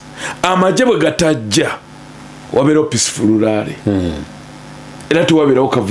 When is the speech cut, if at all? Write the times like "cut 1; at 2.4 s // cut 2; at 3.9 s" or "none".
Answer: none